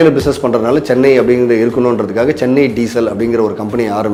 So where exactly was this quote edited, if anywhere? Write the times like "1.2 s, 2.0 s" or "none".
none

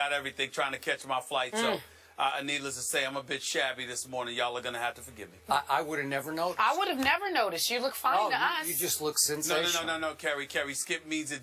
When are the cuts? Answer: 7.7 s

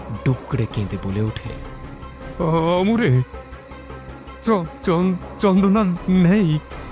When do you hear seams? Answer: none

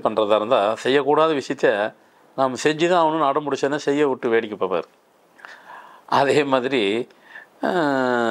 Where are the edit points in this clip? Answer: none

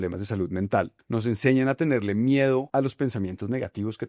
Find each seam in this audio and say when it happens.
1.0 s, 2.7 s

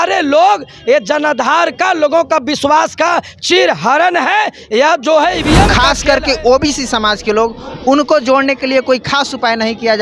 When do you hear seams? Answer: 5.8 s

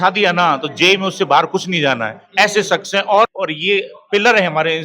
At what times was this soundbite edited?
3.3 s

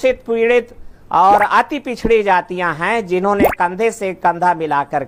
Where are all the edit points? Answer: none

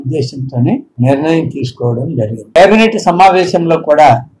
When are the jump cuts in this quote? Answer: 0.9 s, 2.6 s

